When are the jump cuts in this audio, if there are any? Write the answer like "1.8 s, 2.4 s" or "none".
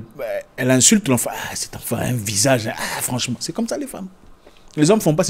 none